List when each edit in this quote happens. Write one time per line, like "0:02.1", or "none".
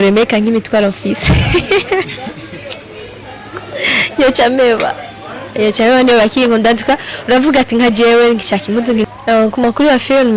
0:09.2